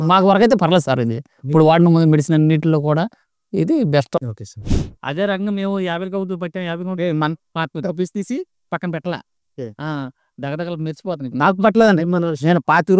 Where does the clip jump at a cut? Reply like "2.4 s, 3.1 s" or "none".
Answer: 4.8 s